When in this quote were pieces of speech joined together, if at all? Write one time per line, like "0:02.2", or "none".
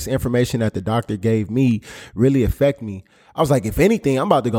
none